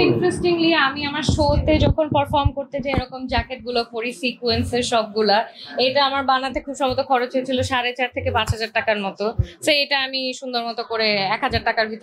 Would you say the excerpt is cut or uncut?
uncut